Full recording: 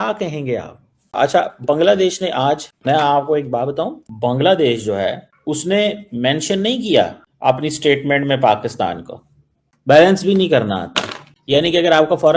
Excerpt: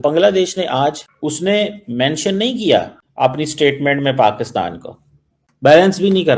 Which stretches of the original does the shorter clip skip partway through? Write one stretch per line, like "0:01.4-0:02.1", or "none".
0:02.7-0:05.3